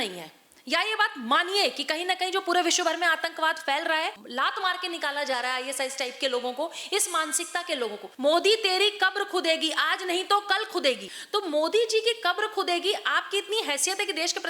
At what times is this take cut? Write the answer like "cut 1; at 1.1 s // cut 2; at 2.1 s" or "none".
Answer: cut 1; at 4.2 s // cut 2; at 8.1 s // cut 3; at 11.1 s